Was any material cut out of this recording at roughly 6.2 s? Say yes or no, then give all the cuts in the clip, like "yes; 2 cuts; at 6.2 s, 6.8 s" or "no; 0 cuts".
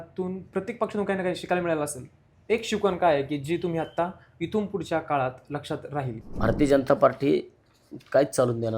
yes; 1 cut; at 6.2 s